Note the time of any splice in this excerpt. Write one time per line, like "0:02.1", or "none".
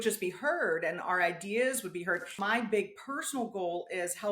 0:02.4